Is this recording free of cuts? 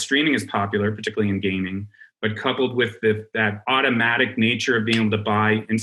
no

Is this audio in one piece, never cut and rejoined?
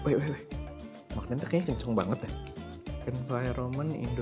no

